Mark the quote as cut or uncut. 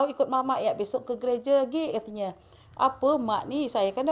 uncut